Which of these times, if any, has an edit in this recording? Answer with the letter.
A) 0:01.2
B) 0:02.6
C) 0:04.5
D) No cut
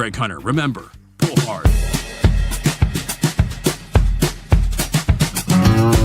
A